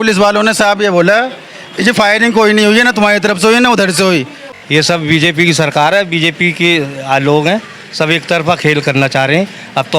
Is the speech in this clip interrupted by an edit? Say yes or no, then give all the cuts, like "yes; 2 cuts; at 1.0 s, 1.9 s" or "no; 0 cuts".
yes; 1 cut; at 4.3 s